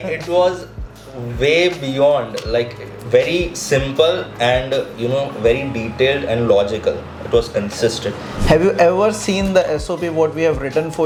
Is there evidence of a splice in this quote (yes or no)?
no